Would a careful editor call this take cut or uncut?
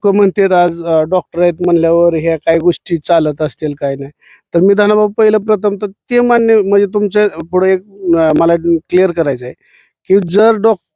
uncut